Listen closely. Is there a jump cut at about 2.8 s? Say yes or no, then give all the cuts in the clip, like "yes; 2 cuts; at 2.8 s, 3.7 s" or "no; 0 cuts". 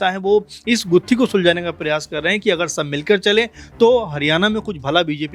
no; 0 cuts